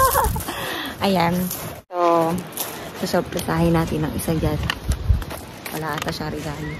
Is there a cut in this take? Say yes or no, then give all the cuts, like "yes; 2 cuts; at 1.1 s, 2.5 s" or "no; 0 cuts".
yes; 1 cut; at 1.8 s